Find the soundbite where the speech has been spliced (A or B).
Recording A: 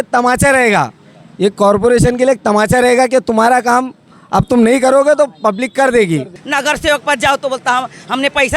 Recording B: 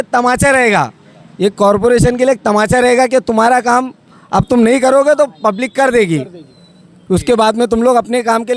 A